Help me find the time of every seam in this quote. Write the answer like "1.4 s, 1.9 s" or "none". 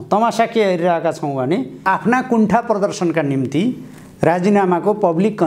1.8 s